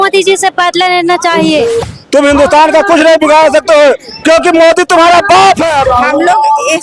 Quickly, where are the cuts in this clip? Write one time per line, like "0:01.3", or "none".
0:02.0
0:05.8